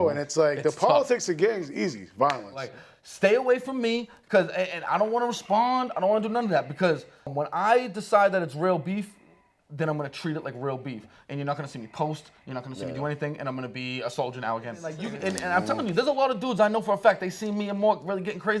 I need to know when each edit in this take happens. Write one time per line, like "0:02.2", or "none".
0:02.7
0:15.1